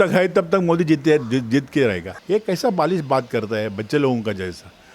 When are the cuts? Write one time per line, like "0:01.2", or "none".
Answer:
0:02.1